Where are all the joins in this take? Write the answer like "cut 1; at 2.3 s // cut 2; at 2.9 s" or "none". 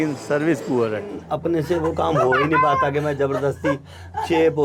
cut 1; at 1.2 s